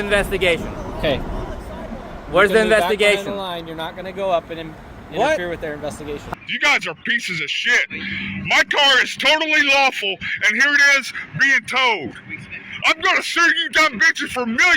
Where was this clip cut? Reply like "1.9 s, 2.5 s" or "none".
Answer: 6.2 s